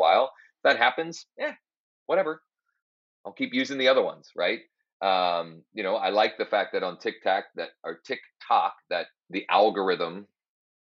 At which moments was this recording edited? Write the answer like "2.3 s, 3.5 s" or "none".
9.2 s